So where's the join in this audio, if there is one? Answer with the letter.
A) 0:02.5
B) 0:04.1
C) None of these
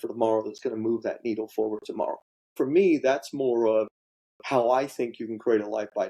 A